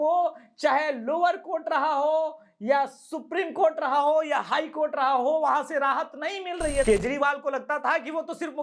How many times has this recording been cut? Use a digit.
1